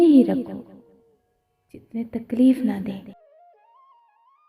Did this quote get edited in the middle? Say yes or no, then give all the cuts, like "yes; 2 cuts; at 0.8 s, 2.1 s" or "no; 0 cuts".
yes; 1 cut; at 3.1 s